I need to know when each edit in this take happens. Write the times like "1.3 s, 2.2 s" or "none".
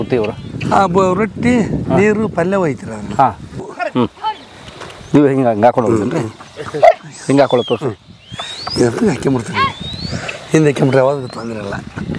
none